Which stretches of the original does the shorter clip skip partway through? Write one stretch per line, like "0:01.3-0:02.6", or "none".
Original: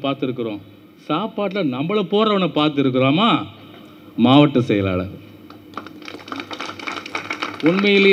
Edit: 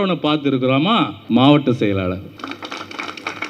0:03.5-0:04.1
0:05.2-0:06.2